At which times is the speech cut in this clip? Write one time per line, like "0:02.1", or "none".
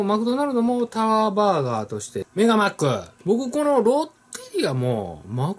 0:02.2
0:03.1

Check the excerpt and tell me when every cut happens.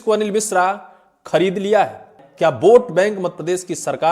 0:02.2

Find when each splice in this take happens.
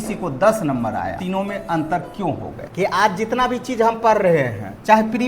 0:01.2
0:02.6

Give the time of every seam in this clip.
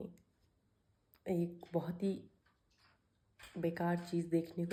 none

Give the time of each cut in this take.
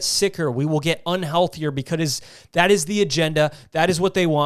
none

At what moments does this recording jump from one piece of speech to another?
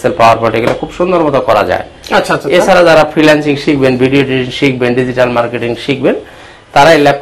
none

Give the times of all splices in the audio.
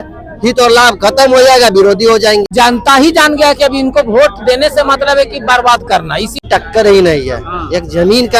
0:02.5
0:06.4

